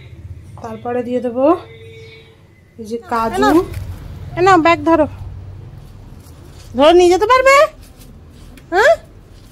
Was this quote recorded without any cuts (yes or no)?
no